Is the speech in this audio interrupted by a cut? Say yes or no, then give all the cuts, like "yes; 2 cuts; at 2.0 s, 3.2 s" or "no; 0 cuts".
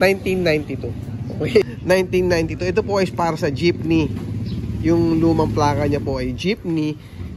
yes; 1 cut; at 1.8 s